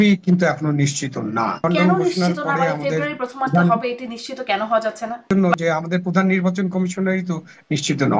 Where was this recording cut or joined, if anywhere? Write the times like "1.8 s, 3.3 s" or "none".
1.6 s, 5.3 s